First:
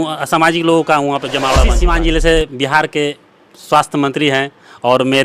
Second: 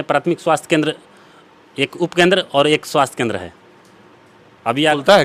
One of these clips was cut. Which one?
first; 1 cut; at 1.7 s

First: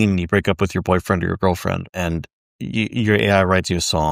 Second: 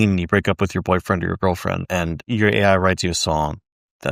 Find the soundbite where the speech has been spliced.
second; 1 cut; at 2.2 s

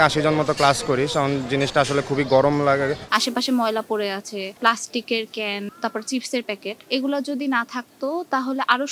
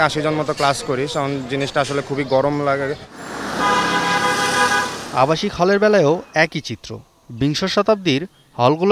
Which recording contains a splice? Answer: first; 4 cuts; at 3.0 s, 4.6 s, 5.7 s, 6.7 s

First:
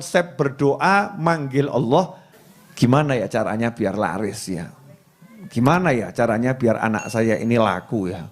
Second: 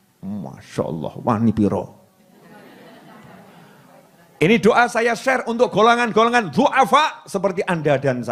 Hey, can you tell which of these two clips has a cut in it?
first; 1 cut; at 2.3 s

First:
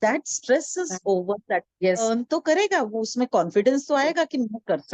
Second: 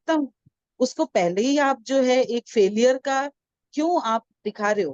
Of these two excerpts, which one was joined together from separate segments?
first; 1 cut; at 2.0 s

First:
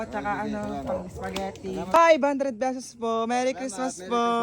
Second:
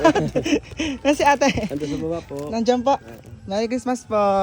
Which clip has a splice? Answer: first; 1 cut; at 1.9 s

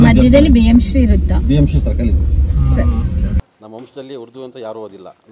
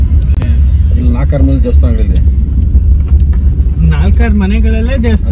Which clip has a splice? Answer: first; 1 cut; at 3.6 s

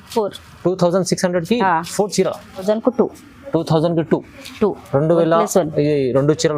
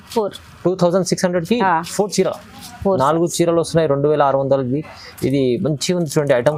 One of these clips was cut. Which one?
first; 1 cut; at 2.6 s

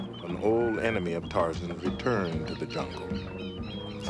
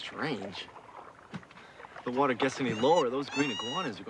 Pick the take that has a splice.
second; 1 cut; at 1.8 s

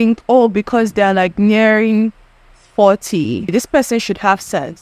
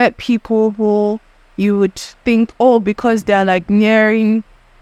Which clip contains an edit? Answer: first; 1 cut; at 3.5 s

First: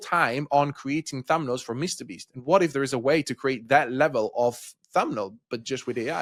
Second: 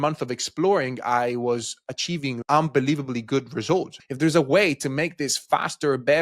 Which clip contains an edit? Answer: second; 2 cuts; at 2.4 s, 4.0 s

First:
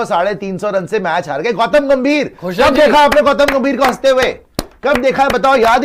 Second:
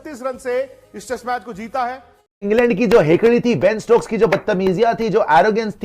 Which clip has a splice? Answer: second; 1 cut; at 2.4 s

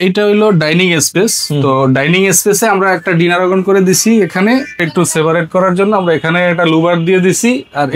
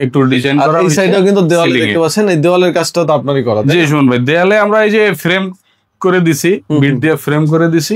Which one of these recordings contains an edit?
first; 1 cut; at 4.9 s

